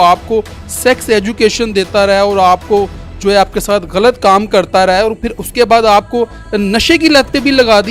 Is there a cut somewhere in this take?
no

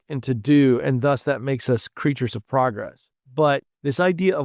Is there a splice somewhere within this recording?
no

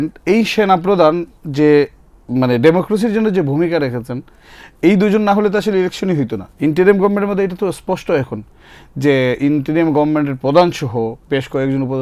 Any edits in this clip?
no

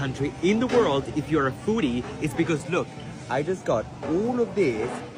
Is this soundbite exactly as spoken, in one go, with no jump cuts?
yes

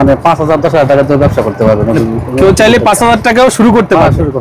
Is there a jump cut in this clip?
no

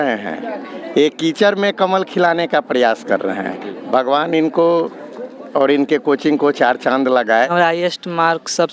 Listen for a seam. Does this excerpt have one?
yes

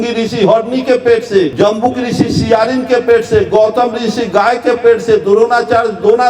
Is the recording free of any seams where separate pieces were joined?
no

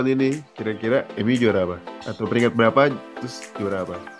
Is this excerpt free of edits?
no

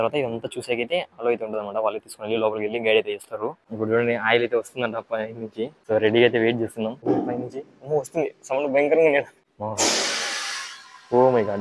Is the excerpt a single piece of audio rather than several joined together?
no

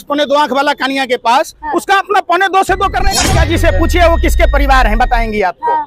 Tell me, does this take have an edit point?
yes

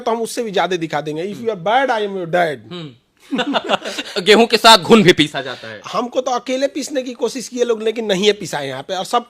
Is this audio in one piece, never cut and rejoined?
no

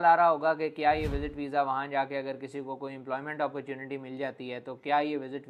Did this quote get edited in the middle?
no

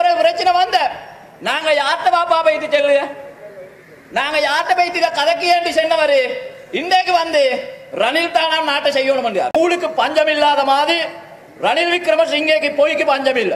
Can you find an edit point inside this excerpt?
yes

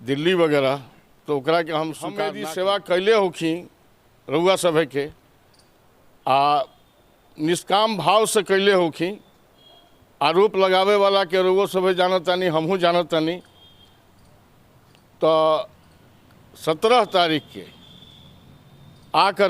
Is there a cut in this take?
yes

